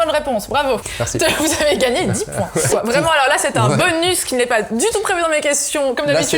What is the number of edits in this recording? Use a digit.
2